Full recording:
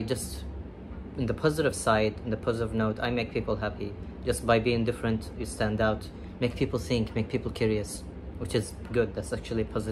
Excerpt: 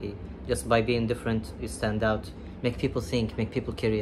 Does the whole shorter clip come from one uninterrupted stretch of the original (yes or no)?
yes